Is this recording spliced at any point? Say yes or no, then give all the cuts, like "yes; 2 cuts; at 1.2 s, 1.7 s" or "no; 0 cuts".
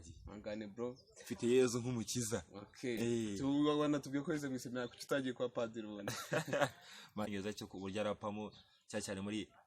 yes; 1 cut; at 7.3 s